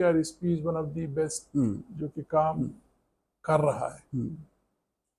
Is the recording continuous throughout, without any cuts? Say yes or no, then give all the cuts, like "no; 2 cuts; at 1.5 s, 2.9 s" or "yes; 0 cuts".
yes; 0 cuts